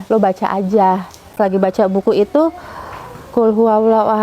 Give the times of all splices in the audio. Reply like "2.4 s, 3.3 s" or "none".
1.4 s